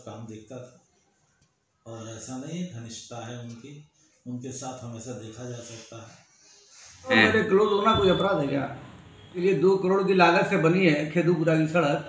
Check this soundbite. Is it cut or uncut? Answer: cut